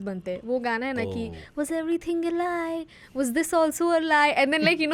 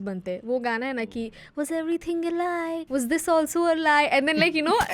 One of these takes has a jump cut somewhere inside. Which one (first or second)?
second